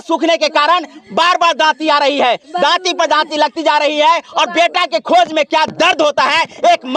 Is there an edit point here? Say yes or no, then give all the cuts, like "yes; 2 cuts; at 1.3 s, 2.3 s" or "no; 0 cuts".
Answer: no; 0 cuts